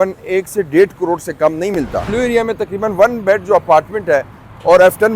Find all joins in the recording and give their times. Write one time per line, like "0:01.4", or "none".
0:02.0